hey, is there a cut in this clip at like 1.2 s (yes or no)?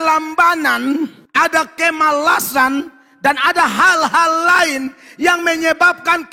yes